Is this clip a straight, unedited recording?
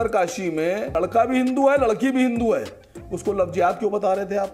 yes; 0 cuts

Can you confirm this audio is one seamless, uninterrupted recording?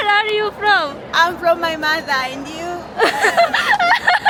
yes; 0 cuts

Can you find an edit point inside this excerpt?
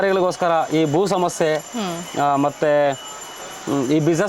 no; 0 cuts

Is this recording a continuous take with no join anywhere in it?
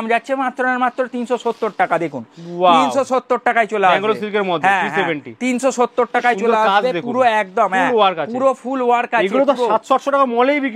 yes; 0 cuts

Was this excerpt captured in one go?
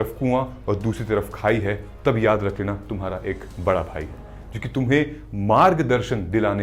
yes; 0 cuts

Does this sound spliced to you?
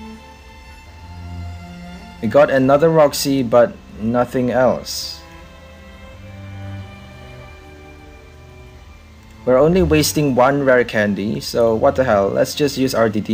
no; 0 cuts

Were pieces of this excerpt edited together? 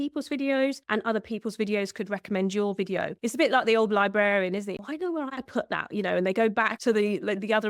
yes; 2 cuts; at 3.1 s, 4.8 s

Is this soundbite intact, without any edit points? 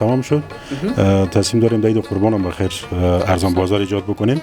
yes; 0 cuts

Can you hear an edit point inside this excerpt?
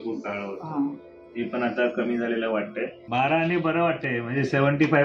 yes; 1 cut; at 3.1 s

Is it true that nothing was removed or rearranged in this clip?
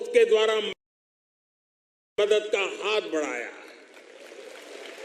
yes; 0 cuts

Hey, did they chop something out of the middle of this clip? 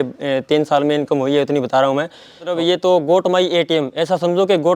yes; 1 cut; at 2.5 s

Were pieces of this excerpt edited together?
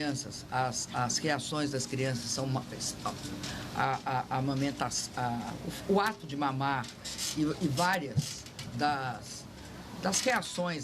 yes; 1 cut; at 2.7 s

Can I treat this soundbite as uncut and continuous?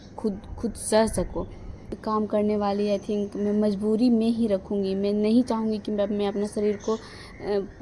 no; 1 cut; at 1.9 s

